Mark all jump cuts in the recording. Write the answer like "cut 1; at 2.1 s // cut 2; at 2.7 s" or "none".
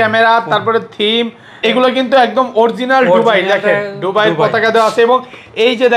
cut 1; at 1.6 s